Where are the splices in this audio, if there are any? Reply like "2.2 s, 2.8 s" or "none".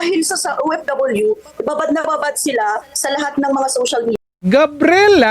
4.2 s